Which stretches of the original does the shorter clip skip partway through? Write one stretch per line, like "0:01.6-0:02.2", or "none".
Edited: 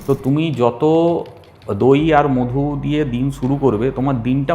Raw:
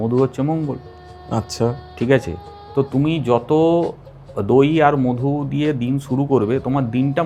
none